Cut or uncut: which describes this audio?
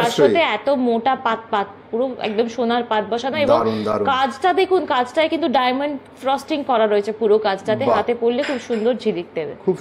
uncut